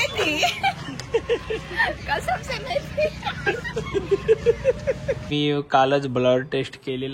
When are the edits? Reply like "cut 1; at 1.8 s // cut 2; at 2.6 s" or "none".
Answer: cut 1; at 5.3 s